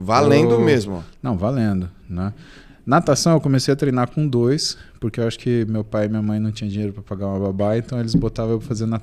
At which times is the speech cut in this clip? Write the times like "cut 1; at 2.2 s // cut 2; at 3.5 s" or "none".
none